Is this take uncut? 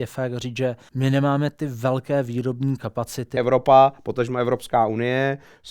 no; 2 cuts; at 0.9 s, 3.3 s

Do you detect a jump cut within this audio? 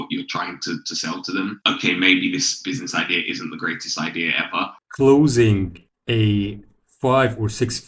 yes; 1 cut; at 4.7 s

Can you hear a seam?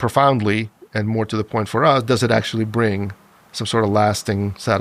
no; 0 cuts

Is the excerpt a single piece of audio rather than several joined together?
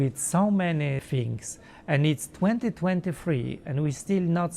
no; 1 cut; at 1.0 s

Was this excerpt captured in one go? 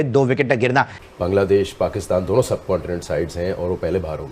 no; 1 cut; at 0.9 s

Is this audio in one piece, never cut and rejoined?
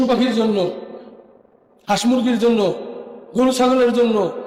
yes; 0 cuts

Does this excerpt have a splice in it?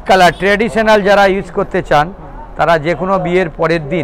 no; 0 cuts

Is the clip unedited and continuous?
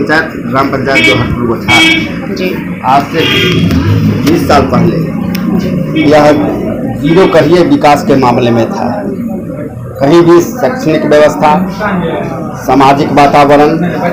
yes; 0 cuts

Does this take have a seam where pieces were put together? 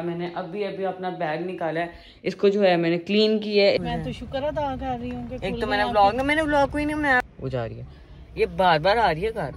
yes; 2 cuts; at 3.8 s, 7.2 s

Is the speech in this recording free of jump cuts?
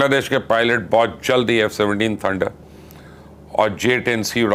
yes; 0 cuts

